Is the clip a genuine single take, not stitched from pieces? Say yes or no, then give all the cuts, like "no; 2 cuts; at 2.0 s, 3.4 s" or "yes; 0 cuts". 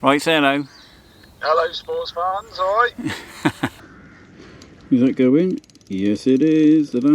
no; 1 cut; at 3.8 s